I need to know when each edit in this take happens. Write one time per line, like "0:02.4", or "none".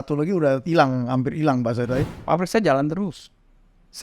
0:02.1